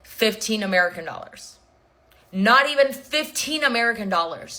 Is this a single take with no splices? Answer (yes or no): yes